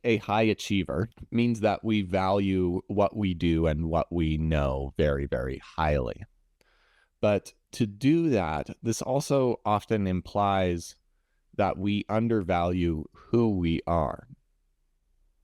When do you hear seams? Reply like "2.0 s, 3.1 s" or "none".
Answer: 1.2 s